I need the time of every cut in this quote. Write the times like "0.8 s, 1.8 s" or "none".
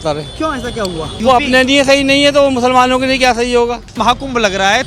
1.1 s, 4.0 s